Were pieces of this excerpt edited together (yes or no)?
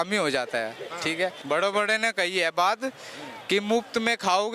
yes